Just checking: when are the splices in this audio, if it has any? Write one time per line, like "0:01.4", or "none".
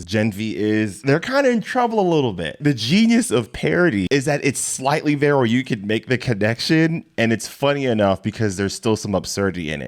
0:01.0
0:02.6
0:04.1